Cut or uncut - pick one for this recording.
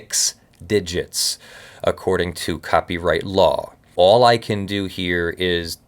cut